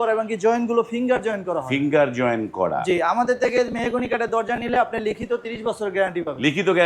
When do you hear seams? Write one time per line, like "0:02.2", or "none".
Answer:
none

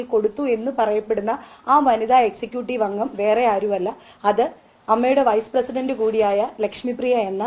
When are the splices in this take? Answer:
none

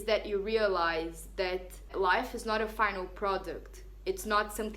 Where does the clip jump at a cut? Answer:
0:01.9

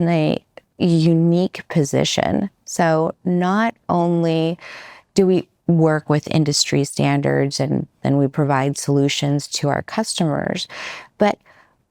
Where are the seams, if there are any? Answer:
none

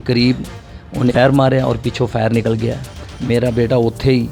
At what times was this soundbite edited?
0:01.1

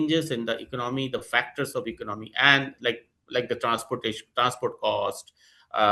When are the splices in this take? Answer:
none

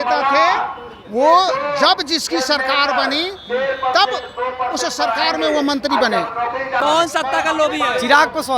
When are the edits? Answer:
0:06.8

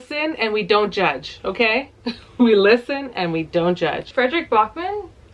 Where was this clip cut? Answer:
0:04.1

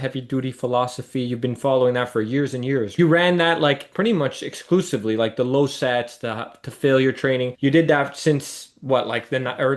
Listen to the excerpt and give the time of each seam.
0:02.9

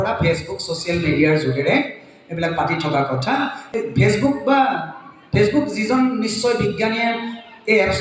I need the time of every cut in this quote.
none

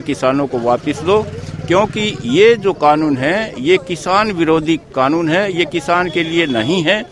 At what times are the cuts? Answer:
none

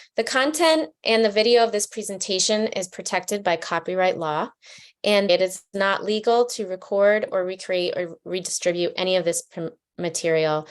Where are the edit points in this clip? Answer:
0:05.3

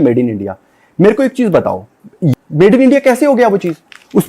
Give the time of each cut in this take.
0:02.3

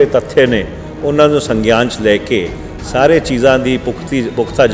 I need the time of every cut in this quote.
none

